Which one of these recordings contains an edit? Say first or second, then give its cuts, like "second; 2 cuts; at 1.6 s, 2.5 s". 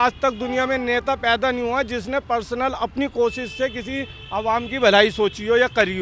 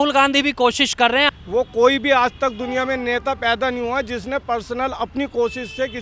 second; 1 cut; at 1.3 s